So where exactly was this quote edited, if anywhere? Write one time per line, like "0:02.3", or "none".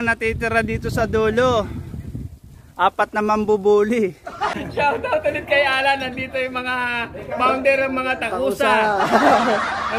0:04.5